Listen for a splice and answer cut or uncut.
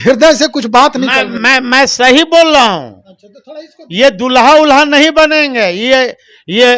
uncut